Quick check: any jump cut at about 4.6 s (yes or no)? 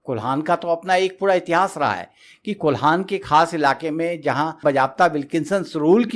yes